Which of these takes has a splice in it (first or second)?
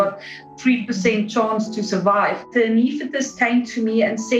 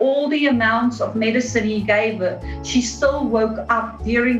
first